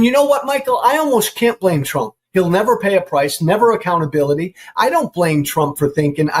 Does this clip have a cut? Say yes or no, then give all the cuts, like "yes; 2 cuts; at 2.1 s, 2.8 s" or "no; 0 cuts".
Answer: yes; 1 cut; at 2.2 s